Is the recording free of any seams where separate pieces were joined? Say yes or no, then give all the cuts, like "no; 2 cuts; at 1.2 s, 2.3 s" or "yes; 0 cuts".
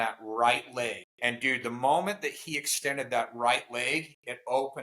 no; 1 cut; at 1.1 s